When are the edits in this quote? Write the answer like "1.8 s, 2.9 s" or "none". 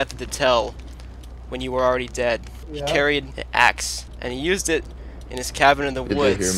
2.6 s, 3.4 s, 4.0 s